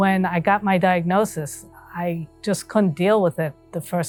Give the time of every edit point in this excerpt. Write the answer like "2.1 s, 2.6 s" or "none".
none